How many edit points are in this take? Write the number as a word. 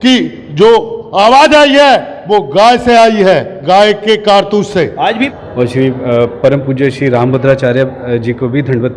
one